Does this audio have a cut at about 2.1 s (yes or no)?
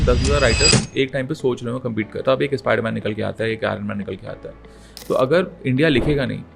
yes